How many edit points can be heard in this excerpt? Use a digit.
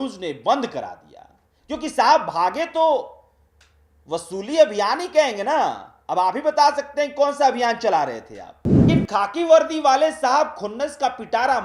1